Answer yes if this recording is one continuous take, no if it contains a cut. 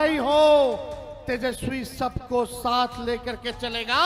yes